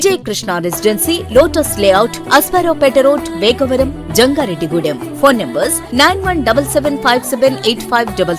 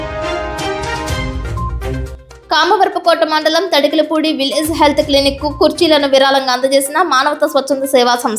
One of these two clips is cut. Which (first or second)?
second